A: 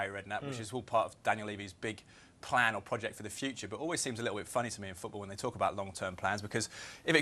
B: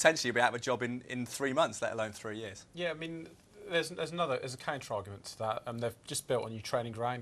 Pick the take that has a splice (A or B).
A